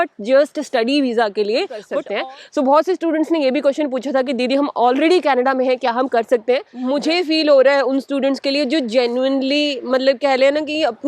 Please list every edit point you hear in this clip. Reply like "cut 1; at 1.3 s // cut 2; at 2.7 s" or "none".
cut 1; at 2.0 s // cut 2; at 6.7 s